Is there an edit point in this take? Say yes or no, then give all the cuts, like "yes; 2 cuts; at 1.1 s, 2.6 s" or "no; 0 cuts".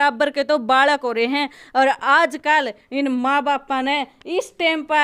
no; 0 cuts